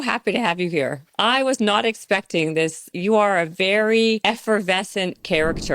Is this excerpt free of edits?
no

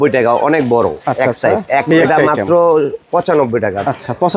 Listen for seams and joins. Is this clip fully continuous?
no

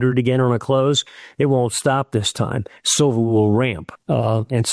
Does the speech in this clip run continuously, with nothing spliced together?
yes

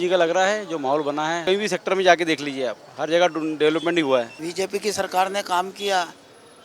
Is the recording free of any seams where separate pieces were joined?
no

